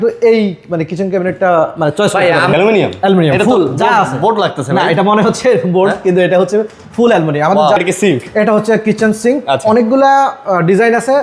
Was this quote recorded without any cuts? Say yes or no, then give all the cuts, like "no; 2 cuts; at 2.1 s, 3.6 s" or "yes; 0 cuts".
no; 2 cuts; at 2.5 s, 7.8 s